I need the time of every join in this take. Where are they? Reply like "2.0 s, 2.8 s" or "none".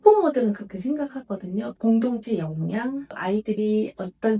1.7 s, 3.1 s